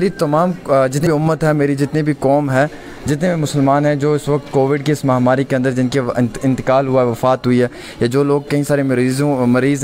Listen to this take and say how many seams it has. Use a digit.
1